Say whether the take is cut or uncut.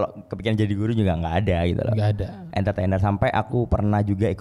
uncut